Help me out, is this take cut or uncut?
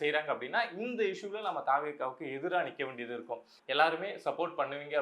cut